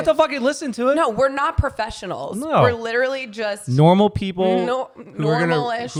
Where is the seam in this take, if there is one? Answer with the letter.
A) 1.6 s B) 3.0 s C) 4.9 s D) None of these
D